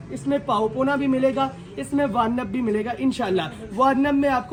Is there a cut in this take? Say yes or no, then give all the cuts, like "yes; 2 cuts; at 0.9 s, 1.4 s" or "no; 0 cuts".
no; 0 cuts